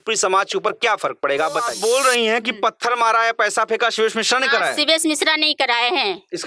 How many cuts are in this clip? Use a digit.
1